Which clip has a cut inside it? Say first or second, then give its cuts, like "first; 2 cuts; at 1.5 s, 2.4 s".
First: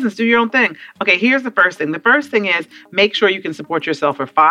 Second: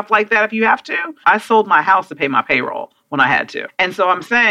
second; 2 cuts; at 1.2 s, 3.7 s